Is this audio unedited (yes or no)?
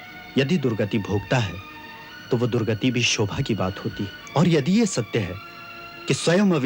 no